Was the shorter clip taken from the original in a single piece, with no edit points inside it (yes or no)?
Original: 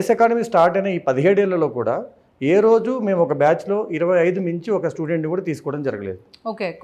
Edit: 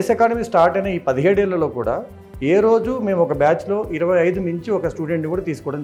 yes